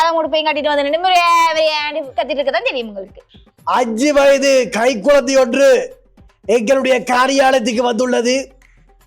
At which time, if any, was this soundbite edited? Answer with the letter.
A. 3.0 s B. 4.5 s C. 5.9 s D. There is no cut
A